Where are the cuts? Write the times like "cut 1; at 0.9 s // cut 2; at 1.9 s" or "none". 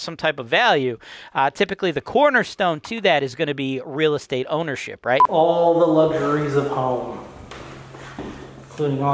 cut 1; at 5.3 s